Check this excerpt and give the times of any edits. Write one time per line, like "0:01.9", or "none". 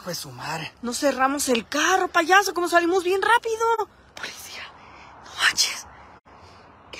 0:04.1